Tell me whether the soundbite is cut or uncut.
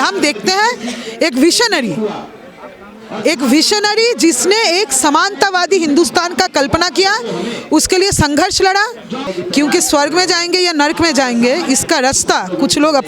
cut